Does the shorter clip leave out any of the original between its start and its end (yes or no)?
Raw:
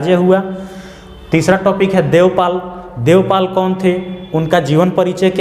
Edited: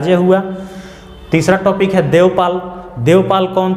no